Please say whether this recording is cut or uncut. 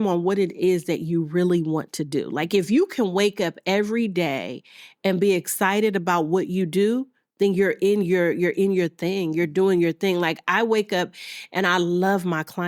uncut